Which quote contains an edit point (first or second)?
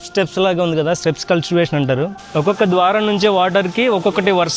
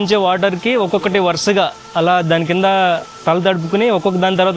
first